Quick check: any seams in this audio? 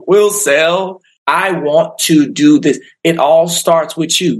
yes; 1 cut; at 1.1 s

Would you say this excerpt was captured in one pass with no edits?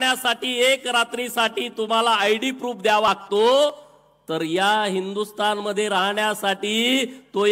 no; 1 cut; at 3.1 s

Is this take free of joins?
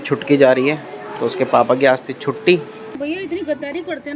no; 1 cut; at 2.9 s

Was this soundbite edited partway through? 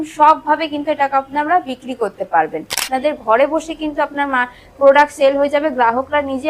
yes; 1 cut; at 2.8 s

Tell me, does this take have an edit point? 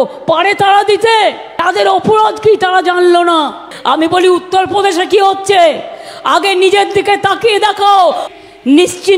yes; 3 cuts; at 1.5 s, 3.7 s, 8.3 s

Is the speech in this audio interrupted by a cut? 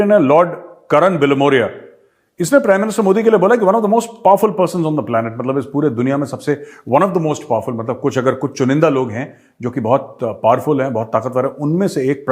no; 0 cuts

